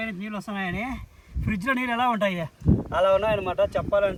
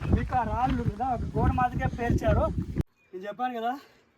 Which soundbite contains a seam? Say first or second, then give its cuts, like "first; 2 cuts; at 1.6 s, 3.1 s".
second; 1 cut; at 2.8 s